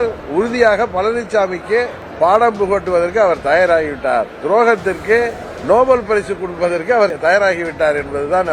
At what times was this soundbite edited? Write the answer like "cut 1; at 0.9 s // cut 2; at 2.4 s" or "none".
cut 1; at 2.0 s // cut 2; at 5.5 s // cut 3; at 7.1 s